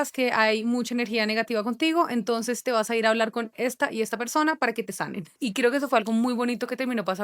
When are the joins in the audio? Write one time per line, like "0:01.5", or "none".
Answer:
0:05.4